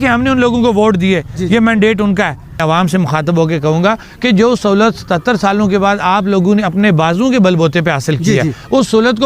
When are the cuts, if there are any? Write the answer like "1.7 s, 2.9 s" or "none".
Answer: 2.6 s